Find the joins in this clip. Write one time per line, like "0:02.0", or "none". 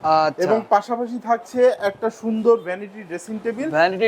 none